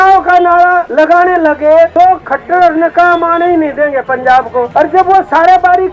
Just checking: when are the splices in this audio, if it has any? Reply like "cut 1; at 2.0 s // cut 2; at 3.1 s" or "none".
cut 1; at 0.9 s // cut 2; at 1.9 s // cut 3; at 4.7 s